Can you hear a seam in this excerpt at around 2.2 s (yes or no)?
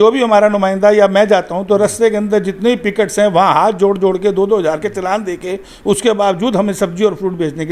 no